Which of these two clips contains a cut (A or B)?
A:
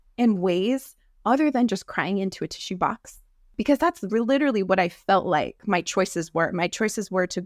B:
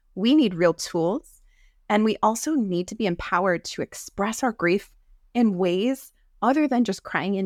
A